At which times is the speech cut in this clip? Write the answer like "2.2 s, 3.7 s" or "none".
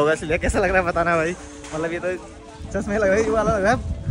none